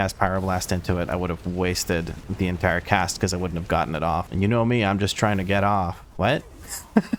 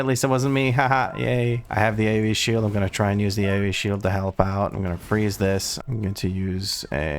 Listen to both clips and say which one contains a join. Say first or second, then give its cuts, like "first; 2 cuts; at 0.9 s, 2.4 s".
second; 1 cut; at 5.8 s